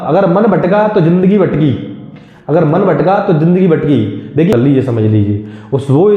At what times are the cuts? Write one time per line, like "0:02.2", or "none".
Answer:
0:04.5